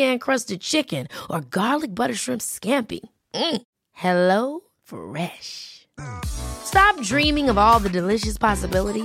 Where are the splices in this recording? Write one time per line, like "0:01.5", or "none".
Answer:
none